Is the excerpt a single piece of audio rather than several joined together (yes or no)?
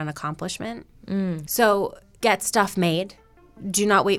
no